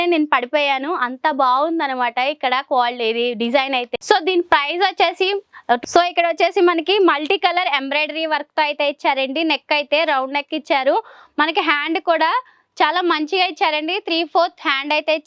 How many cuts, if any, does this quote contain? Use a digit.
1